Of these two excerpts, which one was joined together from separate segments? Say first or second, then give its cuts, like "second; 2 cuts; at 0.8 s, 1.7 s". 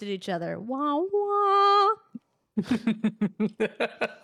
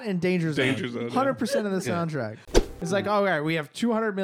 second; 1 cut; at 2.8 s